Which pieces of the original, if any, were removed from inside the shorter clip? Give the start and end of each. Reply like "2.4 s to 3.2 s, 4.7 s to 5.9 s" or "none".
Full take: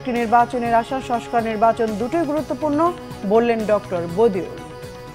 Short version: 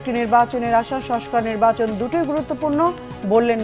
none